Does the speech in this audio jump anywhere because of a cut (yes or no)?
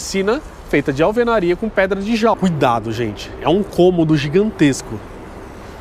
yes